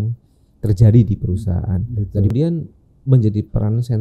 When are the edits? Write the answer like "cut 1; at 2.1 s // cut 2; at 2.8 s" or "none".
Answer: cut 1; at 2.3 s